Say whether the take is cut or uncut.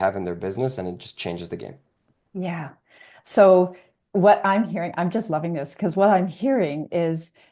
uncut